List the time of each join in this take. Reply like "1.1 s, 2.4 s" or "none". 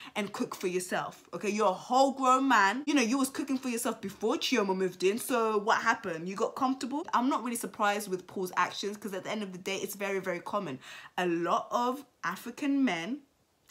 none